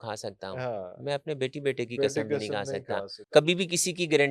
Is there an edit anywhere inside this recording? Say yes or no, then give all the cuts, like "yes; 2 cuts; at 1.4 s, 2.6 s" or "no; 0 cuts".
yes; 1 cut; at 3.2 s